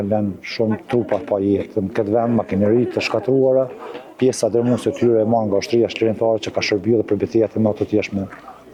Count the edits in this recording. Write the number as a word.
zero